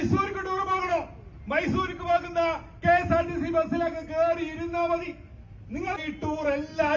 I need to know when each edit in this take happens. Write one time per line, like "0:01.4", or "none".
0:06.1